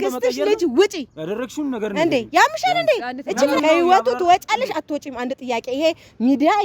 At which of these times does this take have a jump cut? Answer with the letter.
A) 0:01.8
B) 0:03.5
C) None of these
B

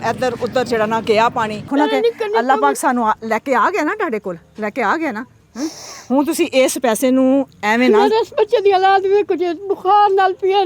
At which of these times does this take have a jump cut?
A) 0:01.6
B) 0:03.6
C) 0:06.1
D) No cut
A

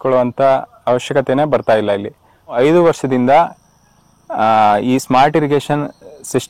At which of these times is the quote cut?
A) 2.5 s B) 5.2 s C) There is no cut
A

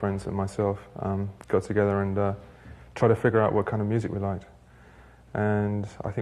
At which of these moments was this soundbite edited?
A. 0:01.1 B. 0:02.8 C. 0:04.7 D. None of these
C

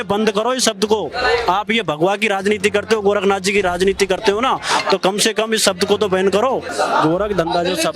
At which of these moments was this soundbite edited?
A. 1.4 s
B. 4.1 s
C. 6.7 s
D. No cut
C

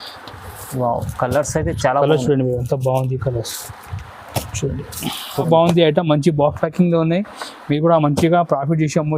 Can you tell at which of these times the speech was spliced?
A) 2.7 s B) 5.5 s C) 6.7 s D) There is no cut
B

